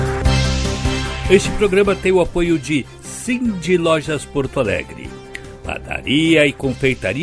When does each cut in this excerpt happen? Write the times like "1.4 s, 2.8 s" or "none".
1.1 s